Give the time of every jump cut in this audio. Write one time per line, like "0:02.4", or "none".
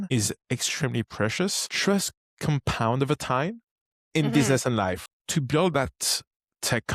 0:01.7
0:05.0

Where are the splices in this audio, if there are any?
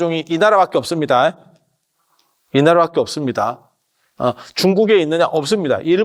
none

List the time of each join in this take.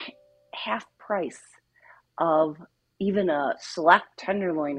none

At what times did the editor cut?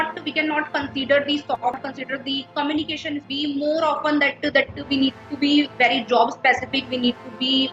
0:01.8
0:03.3

